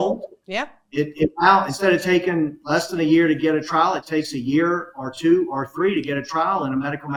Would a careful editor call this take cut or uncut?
uncut